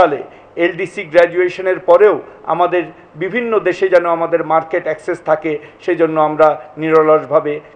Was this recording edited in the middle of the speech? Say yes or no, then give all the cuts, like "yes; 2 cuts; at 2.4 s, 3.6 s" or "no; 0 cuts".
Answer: no; 0 cuts